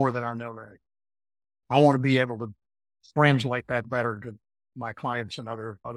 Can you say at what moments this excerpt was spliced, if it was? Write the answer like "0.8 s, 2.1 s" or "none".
none